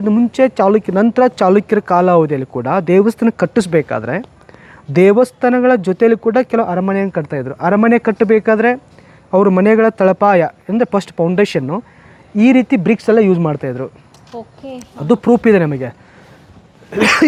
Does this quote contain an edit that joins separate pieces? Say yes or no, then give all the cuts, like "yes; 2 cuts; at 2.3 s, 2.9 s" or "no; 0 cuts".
no; 0 cuts